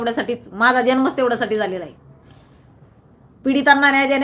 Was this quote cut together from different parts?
no; 0 cuts

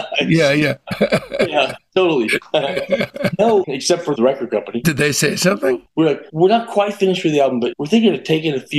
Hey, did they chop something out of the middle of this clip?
yes; 3 cuts; at 4.2 s, 5.9 s, 7.7 s

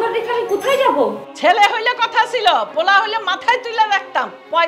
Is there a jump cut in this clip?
yes; 1 cut; at 1.2 s

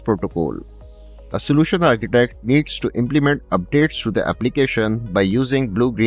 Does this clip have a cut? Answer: no; 0 cuts

